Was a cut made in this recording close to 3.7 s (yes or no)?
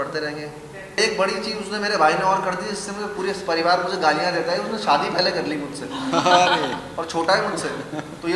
no